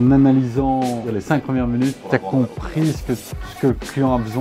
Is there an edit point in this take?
yes; 2 cuts; at 1.2 s, 2.0 s

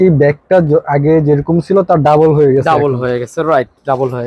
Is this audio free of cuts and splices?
yes; 0 cuts

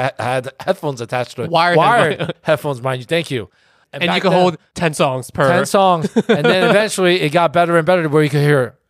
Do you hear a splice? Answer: no; 0 cuts

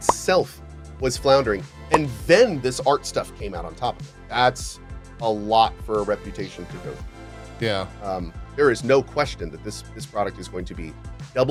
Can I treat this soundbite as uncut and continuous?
yes; 0 cuts

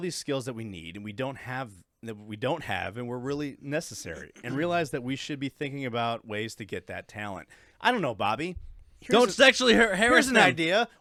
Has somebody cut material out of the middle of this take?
no; 0 cuts

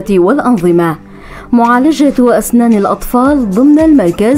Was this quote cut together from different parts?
no; 0 cuts

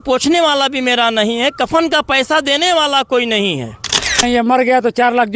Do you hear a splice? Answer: yes; 1 cut; at 4.2 s

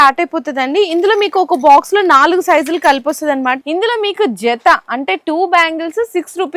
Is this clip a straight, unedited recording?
no; 1 cut; at 3.6 s

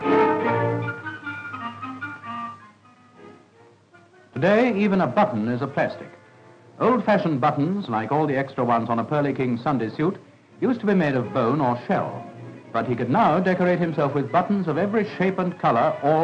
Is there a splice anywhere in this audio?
yes; 1 cut; at 10.7 s

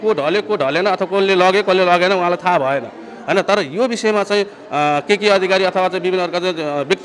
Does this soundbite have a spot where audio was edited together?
no; 0 cuts

